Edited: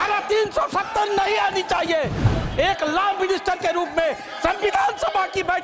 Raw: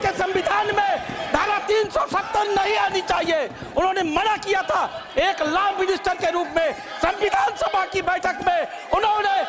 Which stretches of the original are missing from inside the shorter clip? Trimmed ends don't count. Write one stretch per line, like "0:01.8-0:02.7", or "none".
0:03.7-0:04.9